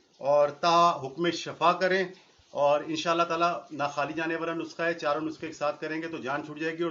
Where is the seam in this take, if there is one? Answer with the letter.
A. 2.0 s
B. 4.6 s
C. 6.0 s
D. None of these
D